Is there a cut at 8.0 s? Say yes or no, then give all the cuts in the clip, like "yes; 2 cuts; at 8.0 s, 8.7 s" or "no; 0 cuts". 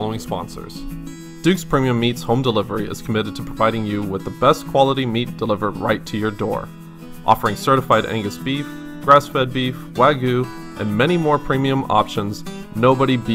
no; 1 cut; at 1.3 s